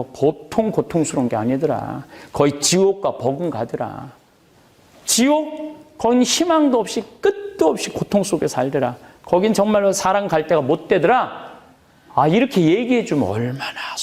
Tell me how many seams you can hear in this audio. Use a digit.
0